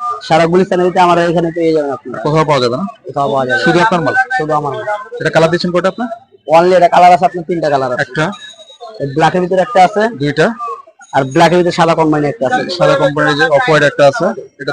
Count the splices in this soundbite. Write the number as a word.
zero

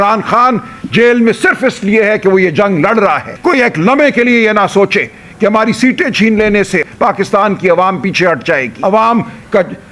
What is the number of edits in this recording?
three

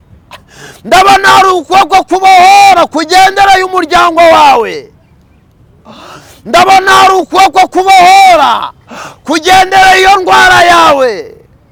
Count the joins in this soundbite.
zero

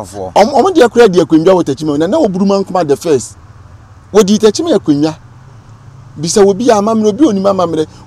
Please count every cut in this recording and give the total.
zero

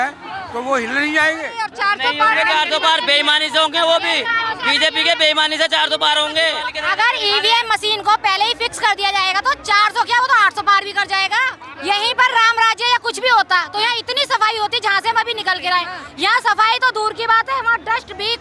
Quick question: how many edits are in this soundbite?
three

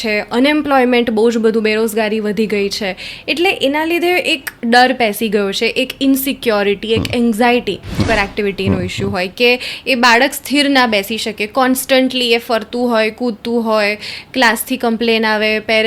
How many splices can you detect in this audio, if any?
one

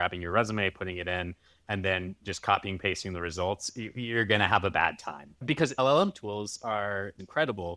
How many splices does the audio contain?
one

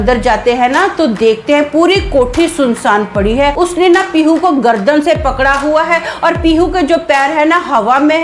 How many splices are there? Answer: one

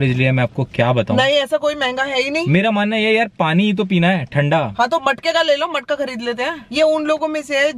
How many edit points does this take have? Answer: two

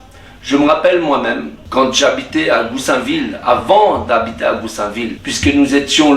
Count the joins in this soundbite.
two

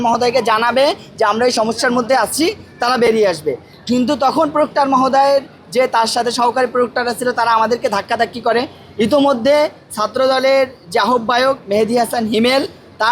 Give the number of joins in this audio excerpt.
zero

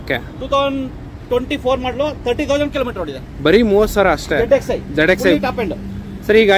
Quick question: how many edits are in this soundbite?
zero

